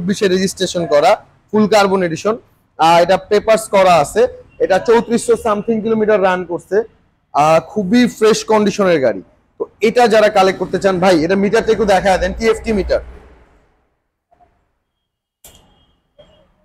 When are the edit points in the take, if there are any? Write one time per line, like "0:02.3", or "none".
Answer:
none